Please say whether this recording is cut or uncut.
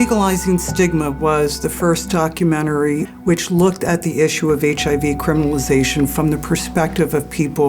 cut